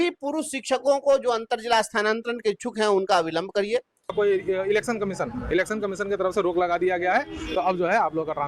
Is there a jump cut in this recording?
yes; 1 cut; at 4.1 s

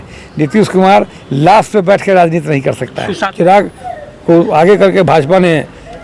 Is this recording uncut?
no; 1 cut; at 3.3 s

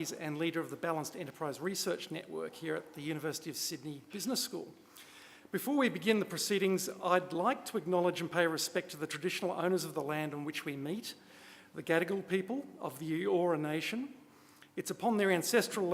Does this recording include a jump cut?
yes; 1 cut; at 13.5 s

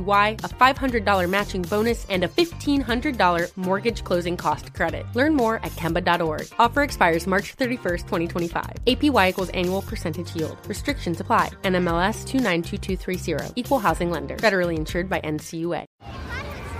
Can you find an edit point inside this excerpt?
no; 0 cuts

